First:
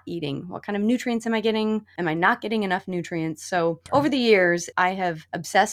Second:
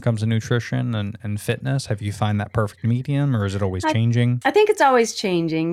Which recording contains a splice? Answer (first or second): first